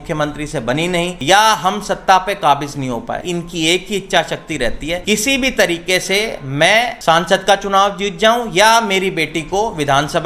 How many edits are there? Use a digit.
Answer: 4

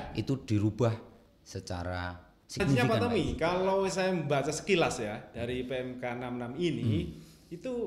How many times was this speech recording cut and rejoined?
1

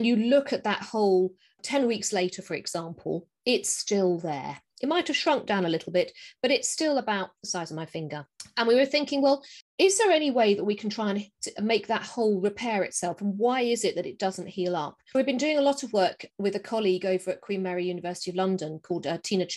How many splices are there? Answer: 2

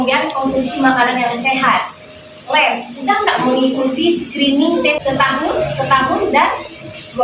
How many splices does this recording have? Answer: 1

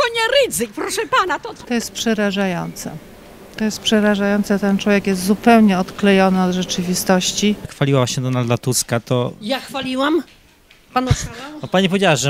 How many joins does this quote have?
2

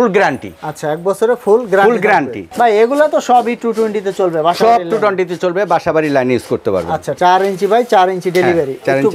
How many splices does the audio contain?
2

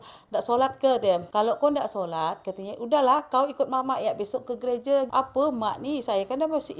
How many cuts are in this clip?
2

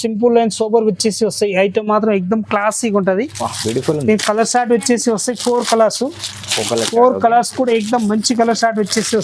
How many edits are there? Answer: 0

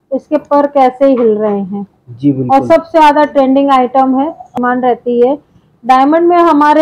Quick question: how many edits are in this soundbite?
1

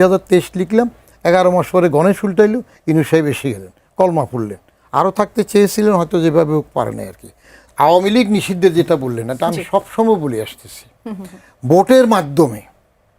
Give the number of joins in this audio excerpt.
1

